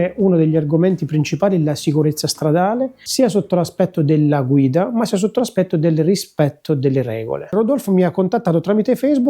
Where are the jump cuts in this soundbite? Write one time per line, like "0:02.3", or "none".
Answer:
none